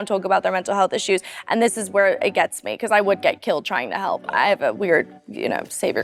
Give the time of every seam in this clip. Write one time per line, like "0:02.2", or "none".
none